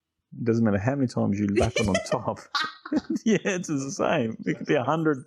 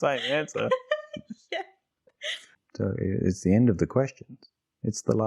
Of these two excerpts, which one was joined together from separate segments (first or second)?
second